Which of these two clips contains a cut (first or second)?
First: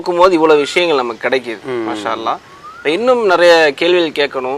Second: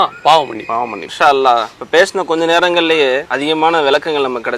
second